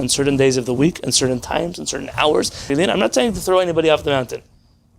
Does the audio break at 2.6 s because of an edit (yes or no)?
yes